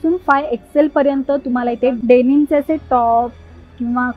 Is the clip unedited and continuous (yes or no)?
no